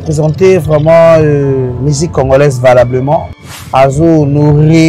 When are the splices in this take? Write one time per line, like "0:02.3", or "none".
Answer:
0:01.8
0:03.4